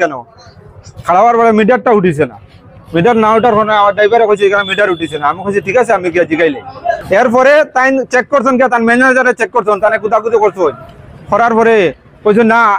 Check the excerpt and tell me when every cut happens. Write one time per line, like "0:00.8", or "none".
0:07.0